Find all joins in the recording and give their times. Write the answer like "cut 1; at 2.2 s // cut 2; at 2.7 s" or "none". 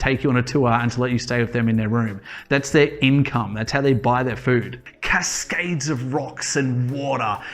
cut 1; at 4.8 s

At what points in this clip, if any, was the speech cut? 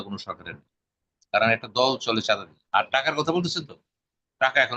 cut 1; at 2.5 s

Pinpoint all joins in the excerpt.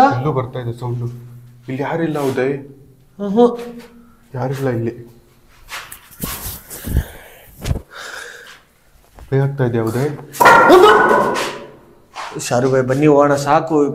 none

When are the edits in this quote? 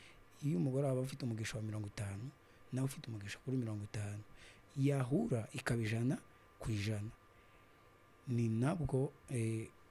none

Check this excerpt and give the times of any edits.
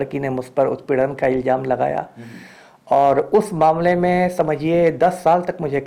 none

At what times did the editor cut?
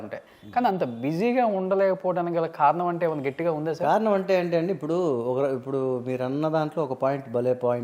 none

